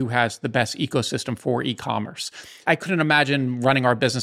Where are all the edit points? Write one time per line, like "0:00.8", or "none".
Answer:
0:02.6